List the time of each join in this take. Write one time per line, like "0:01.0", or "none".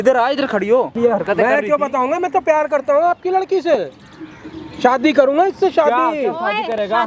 0:00.9